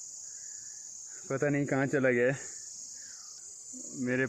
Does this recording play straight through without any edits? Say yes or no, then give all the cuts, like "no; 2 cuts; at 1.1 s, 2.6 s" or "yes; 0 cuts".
no; 1 cut; at 3.3 s